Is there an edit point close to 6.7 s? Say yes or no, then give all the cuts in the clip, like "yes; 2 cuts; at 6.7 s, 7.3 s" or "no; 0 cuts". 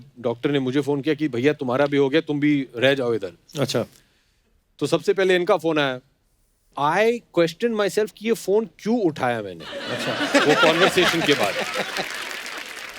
yes; 1 cut; at 6.7 s